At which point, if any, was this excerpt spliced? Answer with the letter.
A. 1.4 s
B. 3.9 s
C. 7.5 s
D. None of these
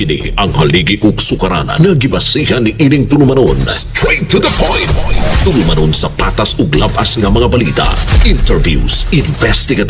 D